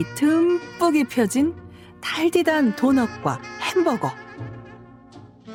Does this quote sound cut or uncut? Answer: uncut